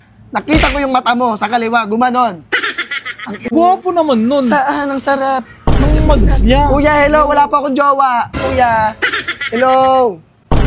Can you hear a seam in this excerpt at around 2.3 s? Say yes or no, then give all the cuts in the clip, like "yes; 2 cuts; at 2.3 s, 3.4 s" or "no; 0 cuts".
no; 1 cut; at 3.5 s